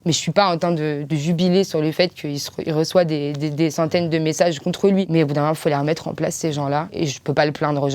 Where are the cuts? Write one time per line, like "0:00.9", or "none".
0:06.9